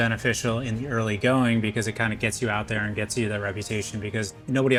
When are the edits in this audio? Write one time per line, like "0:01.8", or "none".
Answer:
none